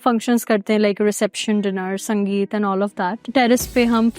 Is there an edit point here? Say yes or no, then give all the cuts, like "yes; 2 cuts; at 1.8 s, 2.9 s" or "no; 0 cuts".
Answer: no; 0 cuts